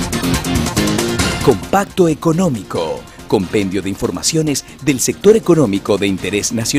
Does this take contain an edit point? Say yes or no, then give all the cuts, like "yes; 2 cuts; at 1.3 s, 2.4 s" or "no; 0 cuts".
yes; 1 cut; at 3.1 s